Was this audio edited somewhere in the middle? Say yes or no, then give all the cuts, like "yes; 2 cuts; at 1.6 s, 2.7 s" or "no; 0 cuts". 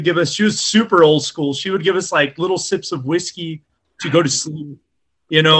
no; 0 cuts